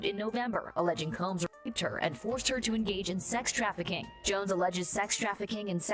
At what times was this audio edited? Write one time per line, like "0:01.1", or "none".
0:04.1